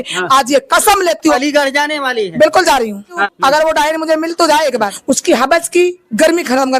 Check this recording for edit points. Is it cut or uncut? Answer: cut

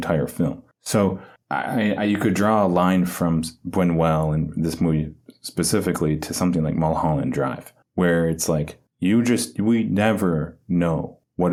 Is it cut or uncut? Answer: uncut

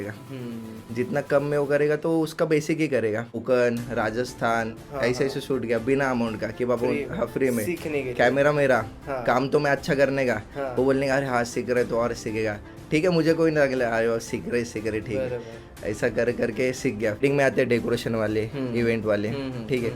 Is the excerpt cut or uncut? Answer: cut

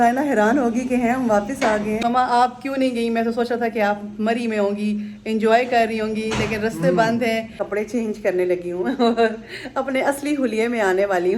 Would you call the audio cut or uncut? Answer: cut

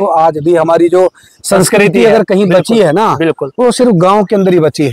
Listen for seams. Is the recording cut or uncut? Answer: uncut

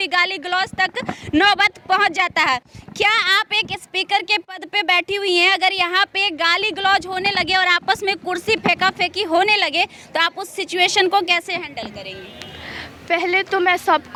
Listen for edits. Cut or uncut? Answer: uncut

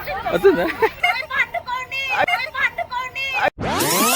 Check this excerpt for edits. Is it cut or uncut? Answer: cut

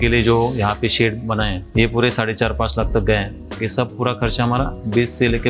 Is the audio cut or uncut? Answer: cut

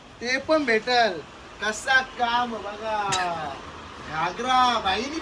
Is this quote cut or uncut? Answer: uncut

